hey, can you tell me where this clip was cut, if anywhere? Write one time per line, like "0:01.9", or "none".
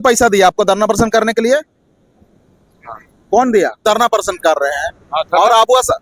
0:03.8